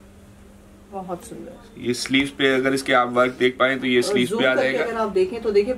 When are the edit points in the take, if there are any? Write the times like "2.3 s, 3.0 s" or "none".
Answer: none